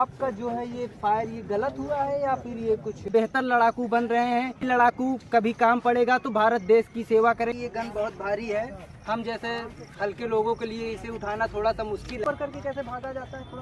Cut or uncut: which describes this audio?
cut